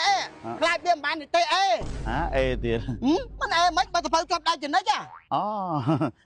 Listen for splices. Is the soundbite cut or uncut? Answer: uncut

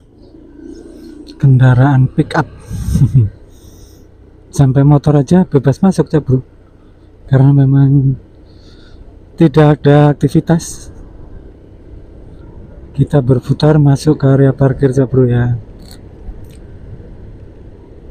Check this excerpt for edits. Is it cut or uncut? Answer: uncut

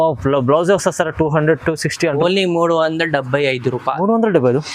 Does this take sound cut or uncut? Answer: cut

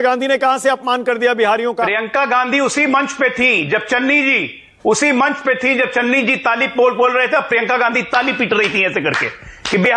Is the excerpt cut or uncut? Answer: uncut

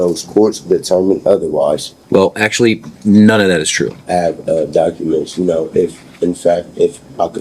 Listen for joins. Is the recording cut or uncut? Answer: cut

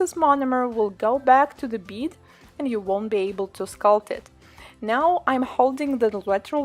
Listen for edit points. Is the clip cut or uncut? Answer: uncut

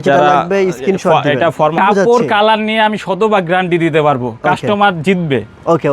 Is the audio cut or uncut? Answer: cut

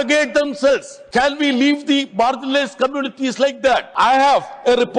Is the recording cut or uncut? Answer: cut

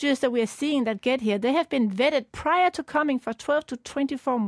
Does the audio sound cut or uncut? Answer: uncut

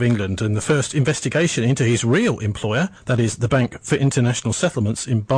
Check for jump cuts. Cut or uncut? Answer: uncut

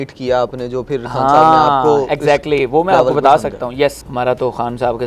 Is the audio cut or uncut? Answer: cut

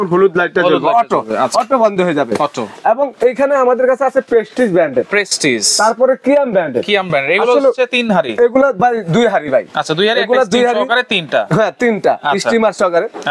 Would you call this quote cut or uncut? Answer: uncut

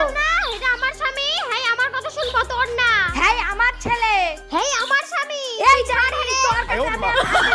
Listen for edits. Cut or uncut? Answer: uncut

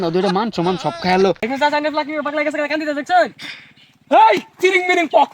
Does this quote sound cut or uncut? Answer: cut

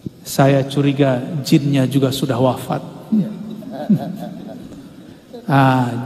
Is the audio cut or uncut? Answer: uncut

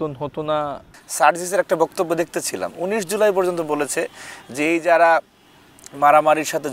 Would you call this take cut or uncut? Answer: cut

